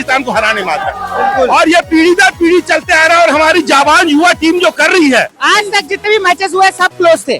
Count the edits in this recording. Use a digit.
1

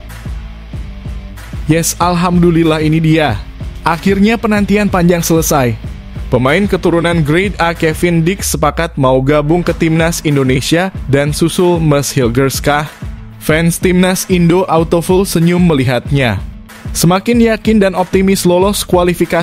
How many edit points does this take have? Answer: 1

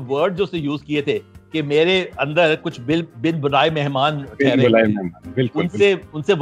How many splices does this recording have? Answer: 0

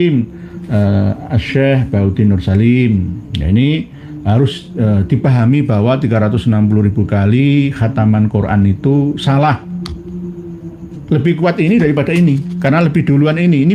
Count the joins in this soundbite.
0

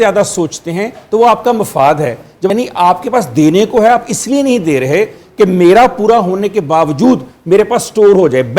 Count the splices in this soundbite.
1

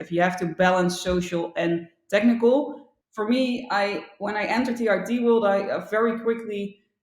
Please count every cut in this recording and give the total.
1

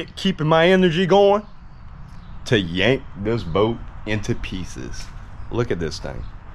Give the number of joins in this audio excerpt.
0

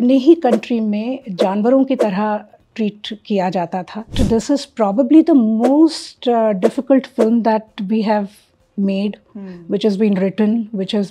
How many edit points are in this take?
1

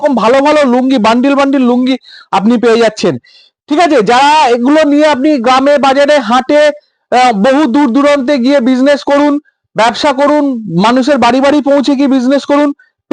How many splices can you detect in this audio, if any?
0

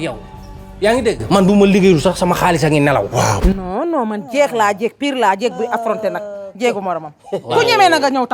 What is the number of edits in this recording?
1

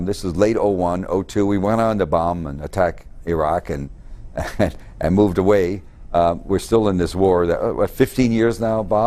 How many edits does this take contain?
1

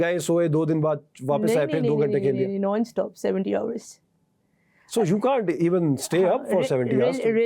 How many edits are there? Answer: 0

